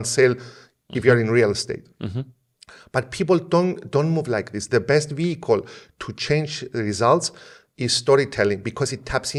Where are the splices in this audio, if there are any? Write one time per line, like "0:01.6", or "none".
none